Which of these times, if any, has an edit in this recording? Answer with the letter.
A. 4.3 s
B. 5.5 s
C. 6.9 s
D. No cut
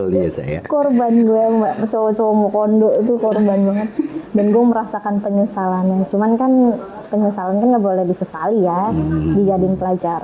D